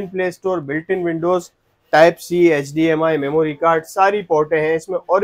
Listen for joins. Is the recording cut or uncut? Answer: uncut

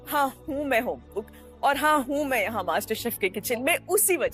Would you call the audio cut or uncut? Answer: uncut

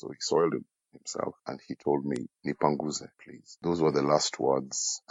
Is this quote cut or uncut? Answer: uncut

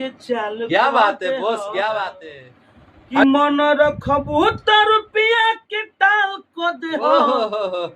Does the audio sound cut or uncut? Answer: cut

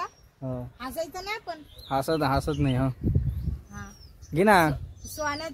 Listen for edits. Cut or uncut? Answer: uncut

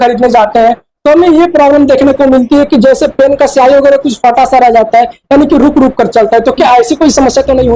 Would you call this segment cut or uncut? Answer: uncut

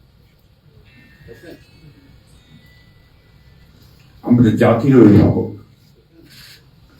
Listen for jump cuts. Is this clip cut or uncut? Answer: uncut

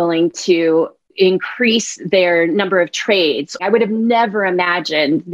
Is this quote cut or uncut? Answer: cut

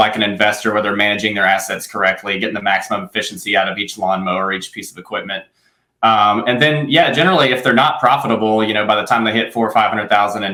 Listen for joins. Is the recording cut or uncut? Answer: uncut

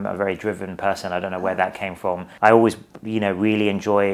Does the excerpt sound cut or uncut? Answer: cut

